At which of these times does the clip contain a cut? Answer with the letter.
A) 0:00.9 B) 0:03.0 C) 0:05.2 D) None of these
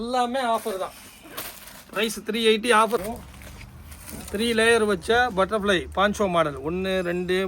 B